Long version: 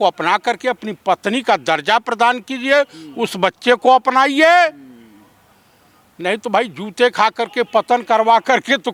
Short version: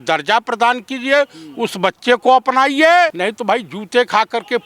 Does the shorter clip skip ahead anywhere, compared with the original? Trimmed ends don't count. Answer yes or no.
yes